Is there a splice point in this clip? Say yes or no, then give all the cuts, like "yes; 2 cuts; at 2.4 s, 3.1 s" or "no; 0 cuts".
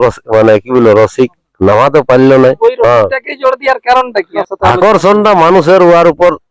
yes; 2 cuts; at 2.6 s, 4.4 s